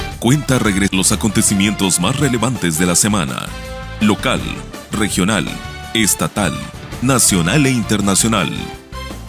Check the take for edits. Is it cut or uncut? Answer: cut